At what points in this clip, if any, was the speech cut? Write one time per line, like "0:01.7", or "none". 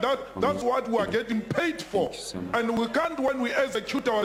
none